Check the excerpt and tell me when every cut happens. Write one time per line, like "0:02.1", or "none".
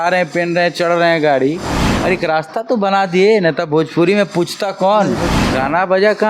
0:01.9
0:05.3